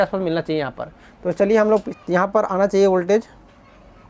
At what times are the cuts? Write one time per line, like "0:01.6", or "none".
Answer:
0:01.9